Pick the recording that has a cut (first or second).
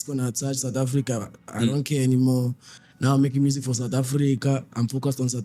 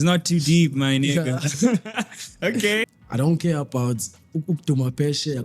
second